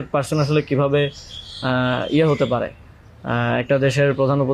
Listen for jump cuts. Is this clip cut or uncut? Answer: uncut